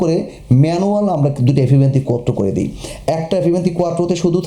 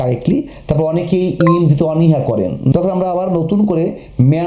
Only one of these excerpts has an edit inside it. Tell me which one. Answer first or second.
second